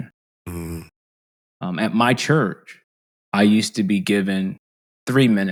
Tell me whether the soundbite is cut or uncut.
uncut